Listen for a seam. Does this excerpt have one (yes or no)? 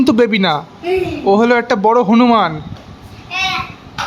no